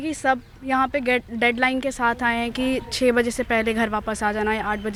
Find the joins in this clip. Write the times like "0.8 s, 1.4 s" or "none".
none